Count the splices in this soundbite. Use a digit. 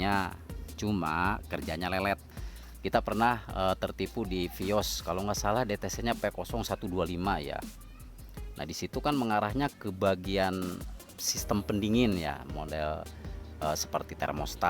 1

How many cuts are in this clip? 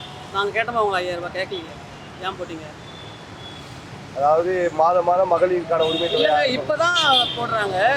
0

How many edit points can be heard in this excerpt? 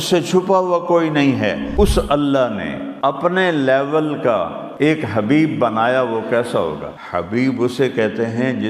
4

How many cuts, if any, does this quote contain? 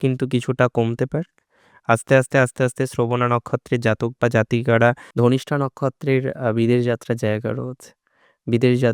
1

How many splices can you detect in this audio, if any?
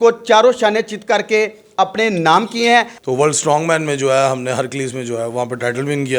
1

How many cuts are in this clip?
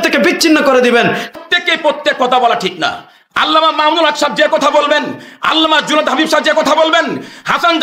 1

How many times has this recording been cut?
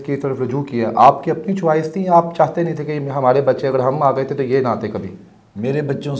0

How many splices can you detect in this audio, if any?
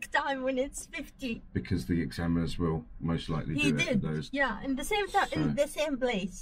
0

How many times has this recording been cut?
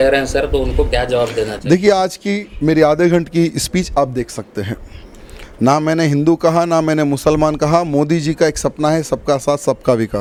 0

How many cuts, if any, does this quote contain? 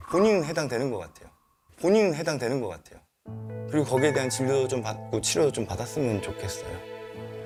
0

